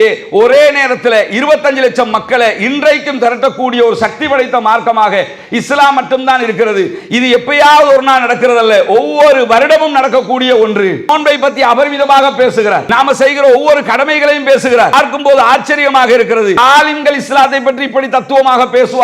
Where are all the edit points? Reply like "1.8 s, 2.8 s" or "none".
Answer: 11.1 s, 12.9 s, 14.9 s, 16.6 s

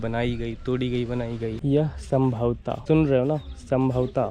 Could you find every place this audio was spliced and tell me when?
1.6 s, 2.7 s

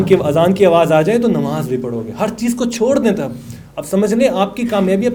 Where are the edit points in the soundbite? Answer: none

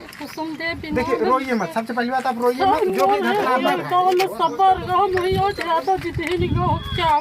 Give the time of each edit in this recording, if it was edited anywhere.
none

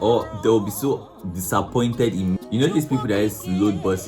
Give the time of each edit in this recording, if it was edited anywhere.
2.4 s

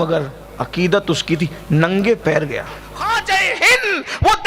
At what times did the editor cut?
2.9 s

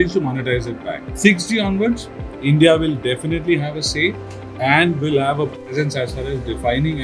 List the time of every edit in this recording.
1.1 s

